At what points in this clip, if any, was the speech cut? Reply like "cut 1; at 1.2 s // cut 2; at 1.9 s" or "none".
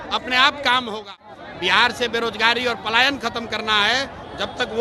cut 1; at 1.3 s